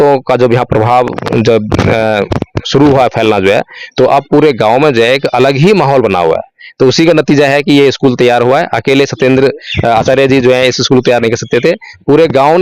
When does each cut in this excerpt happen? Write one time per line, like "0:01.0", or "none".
none

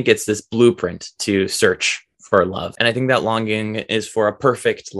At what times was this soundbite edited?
0:02.7

